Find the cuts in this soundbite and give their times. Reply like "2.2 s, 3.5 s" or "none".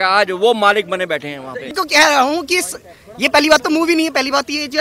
1.7 s